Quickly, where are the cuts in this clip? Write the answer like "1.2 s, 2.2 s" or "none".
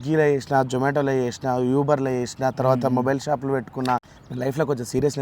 3.9 s